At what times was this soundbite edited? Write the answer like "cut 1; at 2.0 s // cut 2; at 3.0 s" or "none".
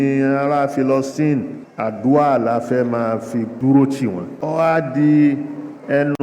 cut 1; at 1.6 s // cut 2; at 3.5 s // cut 3; at 4.3 s